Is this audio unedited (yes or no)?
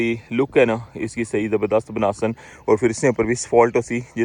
yes